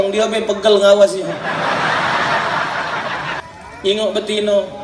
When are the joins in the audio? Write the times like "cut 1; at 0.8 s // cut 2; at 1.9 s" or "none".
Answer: cut 1; at 3.4 s